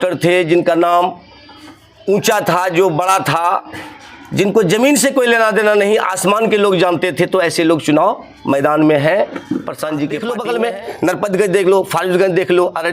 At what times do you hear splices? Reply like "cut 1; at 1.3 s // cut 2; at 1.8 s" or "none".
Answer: cut 1; at 10.2 s